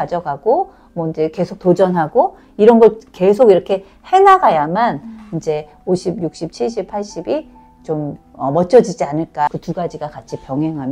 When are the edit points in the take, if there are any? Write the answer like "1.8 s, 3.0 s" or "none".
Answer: 9.5 s